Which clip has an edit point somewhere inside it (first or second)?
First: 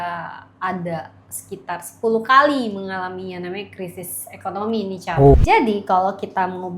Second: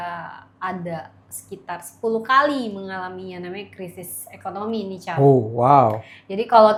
first